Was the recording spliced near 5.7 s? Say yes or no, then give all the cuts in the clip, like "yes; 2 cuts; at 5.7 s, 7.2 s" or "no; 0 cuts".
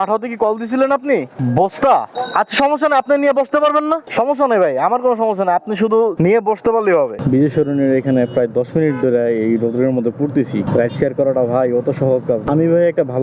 no; 6 cuts; at 1.3 s, 2.2 s, 4.1 s, 7.2 s, 10.7 s, 12.4 s